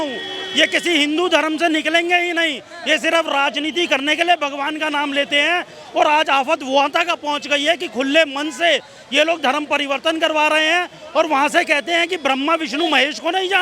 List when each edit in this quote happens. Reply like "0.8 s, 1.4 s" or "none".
none